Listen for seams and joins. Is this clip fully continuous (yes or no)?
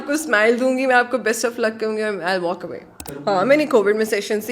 no